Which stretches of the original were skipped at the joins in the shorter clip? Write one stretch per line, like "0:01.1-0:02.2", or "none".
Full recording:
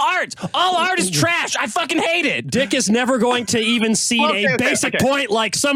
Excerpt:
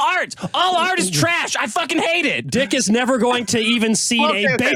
none